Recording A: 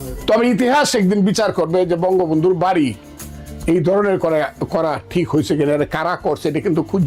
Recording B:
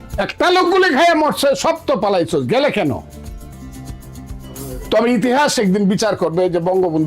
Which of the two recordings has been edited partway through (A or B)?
B